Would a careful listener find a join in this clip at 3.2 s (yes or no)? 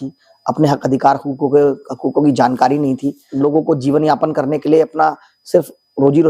yes